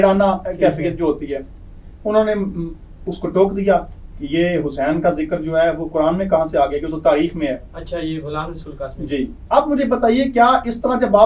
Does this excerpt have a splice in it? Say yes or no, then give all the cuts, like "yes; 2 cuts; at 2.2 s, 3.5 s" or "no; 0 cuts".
no; 0 cuts